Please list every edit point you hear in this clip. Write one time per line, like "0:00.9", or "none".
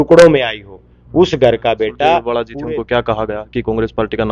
0:02.3